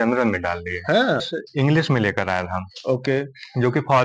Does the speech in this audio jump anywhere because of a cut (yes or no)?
yes